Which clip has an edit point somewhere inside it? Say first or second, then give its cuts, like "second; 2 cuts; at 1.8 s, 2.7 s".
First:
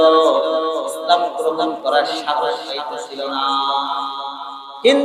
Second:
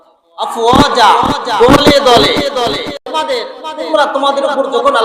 second; 1 cut; at 3.0 s